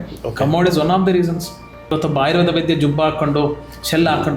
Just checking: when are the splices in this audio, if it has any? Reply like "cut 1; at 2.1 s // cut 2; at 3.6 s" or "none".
cut 1; at 1.9 s